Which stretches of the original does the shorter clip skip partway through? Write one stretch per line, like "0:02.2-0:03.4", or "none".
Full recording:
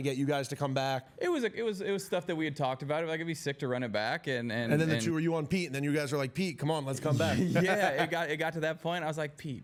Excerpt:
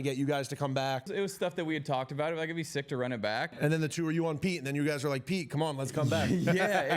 0:01.1-0:01.8
0:04.3-0:04.6